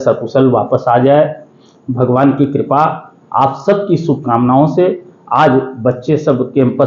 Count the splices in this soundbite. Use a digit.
0